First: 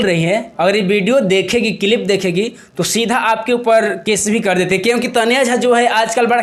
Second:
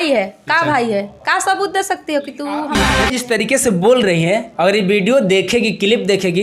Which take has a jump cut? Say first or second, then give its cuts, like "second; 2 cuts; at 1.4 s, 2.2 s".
second; 1 cut; at 2.8 s